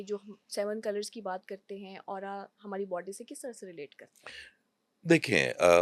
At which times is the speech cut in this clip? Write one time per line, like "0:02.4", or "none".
none